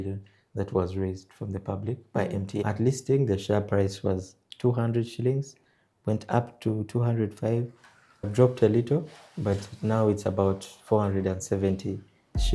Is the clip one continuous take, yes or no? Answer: yes